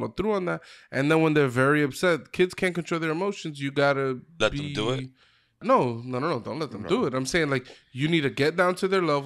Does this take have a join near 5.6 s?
yes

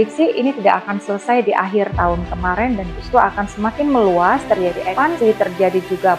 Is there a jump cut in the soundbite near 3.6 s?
no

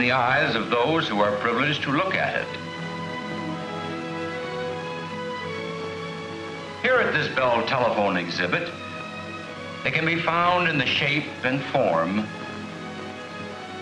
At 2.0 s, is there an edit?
no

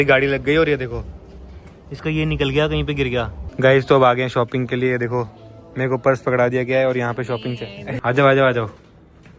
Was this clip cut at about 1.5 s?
no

